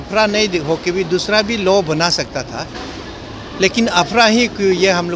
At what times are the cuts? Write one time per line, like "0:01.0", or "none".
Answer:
none